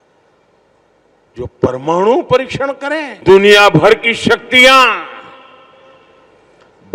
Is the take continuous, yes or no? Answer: no